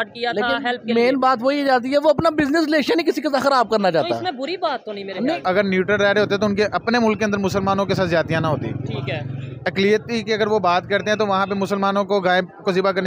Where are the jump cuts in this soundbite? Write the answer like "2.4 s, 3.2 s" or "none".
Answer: 5.4 s